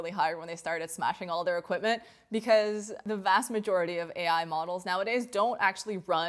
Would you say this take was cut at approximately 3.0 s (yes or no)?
yes